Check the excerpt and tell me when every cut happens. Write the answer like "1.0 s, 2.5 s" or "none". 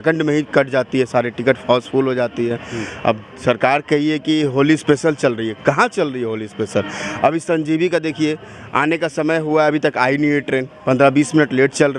none